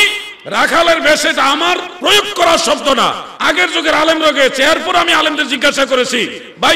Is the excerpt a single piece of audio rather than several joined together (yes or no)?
no